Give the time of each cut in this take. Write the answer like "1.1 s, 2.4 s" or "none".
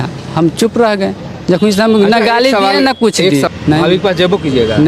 3.5 s